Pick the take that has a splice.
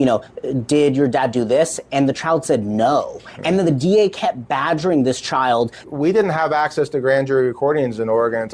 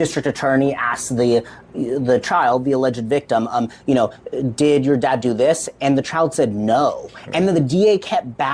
first; 1 cut; at 5.8 s

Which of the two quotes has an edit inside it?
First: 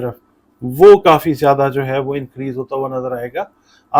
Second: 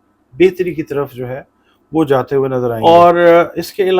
second; 1 cut; at 2.8 s

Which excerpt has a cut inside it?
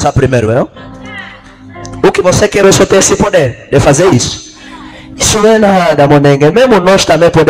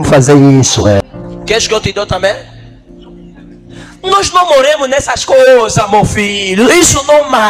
second; 1 cut; at 1.0 s

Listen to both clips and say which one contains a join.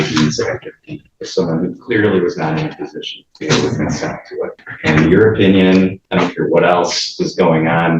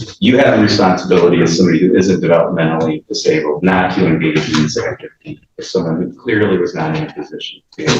first; 2 cuts; at 4.6 s, 6.0 s

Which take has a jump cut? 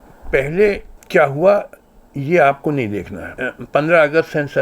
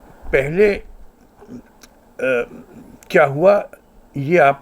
first; 2 cuts; at 0.9 s, 3.4 s

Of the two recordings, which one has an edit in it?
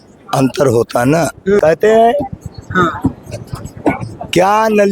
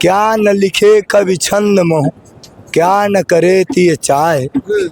first; 1 cut; at 1.6 s

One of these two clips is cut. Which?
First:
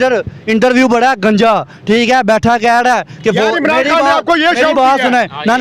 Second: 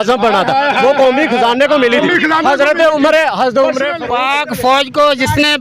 second; 1 cut; at 3.9 s

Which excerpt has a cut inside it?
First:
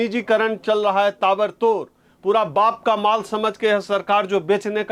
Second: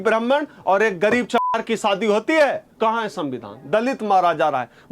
second; 1 cut; at 2.7 s

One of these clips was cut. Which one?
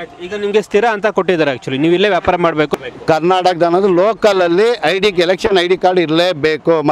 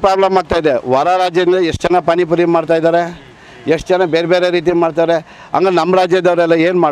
first; 1 cut; at 2.7 s

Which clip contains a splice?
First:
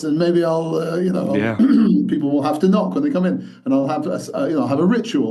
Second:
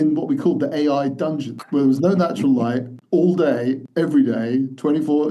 second; 3 cuts; at 1.5 s, 2.9 s, 3.8 s

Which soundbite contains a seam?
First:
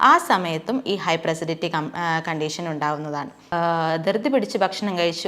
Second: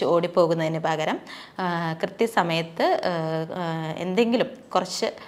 first; 1 cut; at 3.4 s

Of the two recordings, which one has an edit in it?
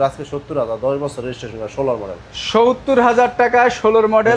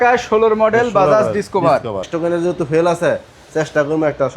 second; 1 cut; at 2.1 s

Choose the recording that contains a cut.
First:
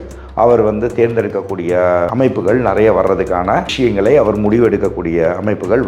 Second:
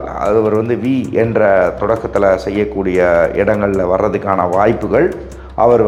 first; 2 cuts; at 2.1 s, 3.7 s

